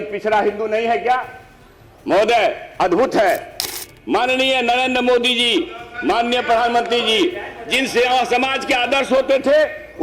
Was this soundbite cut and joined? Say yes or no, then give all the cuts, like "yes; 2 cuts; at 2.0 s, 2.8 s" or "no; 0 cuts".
yes; 1 cut; at 3.7 s